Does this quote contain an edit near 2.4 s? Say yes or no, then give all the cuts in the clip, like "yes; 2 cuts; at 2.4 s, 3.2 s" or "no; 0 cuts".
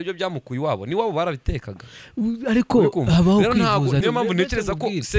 no; 1 cut; at 4.0 s